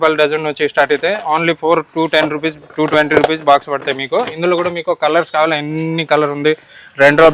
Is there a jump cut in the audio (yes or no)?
no